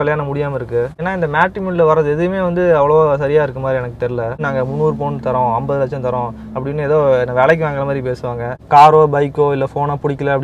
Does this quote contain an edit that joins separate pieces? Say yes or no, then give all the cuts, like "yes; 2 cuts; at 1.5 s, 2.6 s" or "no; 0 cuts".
yes; 3 cuts; at 1.0 s, 4.5 s, 8.6 s